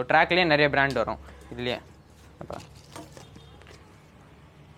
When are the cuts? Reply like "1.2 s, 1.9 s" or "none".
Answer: none